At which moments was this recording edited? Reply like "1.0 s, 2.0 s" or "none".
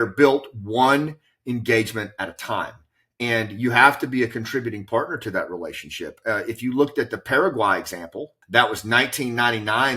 8.3 s